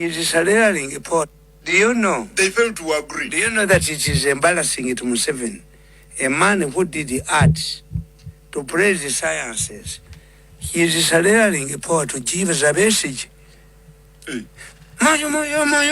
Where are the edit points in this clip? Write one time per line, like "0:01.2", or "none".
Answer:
0:01.4

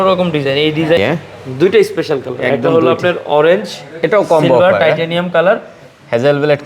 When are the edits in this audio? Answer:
0:01.0

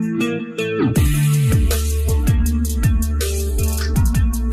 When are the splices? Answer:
none

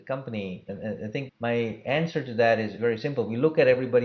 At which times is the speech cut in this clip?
0:00.9
0:02.7

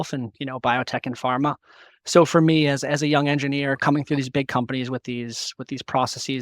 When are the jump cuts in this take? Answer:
0:03.8

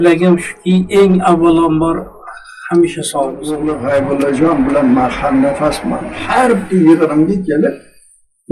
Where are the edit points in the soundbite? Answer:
0:03.5

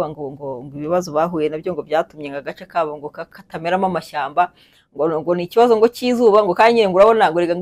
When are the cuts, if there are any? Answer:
none

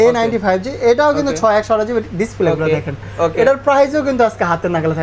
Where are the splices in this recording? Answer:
none

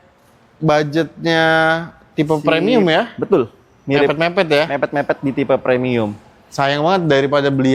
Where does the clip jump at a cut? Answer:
none

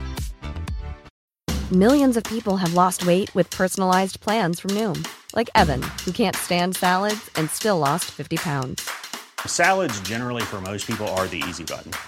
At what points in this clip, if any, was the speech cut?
0:01.2

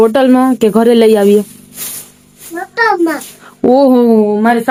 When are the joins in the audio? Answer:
none

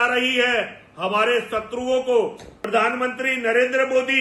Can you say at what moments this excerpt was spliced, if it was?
0:02.5

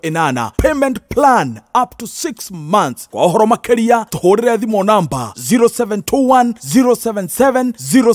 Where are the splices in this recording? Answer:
none

